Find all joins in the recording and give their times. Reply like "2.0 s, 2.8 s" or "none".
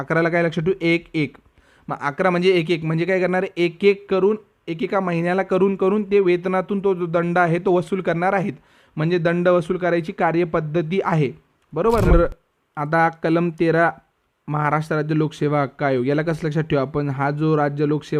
12.1 s